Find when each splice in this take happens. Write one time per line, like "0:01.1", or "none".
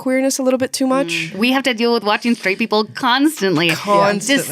0:01.3